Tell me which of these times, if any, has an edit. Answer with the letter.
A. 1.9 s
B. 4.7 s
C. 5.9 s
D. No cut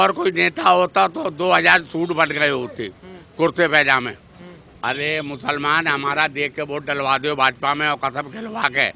B